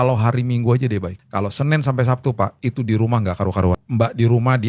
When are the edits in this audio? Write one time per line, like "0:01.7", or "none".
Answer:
0:01.2
0:03.8